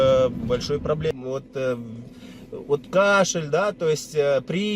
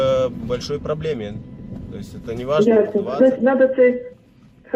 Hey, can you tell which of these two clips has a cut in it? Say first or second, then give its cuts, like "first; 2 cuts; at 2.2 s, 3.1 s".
first; 1 cut; at 1.1 s